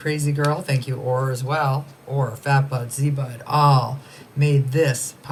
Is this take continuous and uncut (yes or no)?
yes